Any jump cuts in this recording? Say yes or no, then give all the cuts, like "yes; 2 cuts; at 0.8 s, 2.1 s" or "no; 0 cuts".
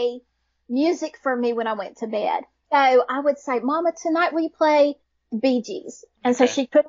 yes; 1 cut; at 2.6 s